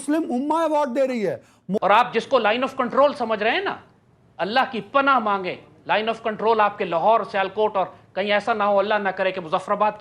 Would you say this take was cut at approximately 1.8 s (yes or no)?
yes